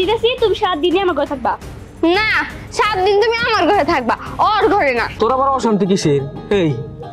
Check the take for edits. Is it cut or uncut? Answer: cut